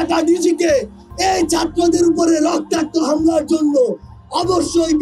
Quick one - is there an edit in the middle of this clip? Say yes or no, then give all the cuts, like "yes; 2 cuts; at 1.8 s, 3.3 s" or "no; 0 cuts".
no; 0 cuts